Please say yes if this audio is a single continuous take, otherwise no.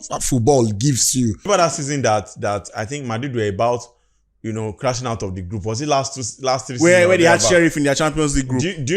no